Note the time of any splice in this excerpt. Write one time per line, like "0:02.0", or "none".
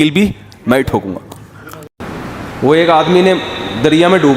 0:01.8